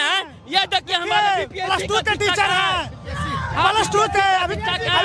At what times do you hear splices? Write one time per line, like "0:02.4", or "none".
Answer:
none